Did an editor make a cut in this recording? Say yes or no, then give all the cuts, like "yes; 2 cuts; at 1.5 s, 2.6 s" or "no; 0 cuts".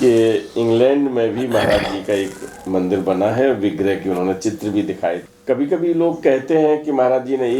yes; 1 cut; at 5.2 s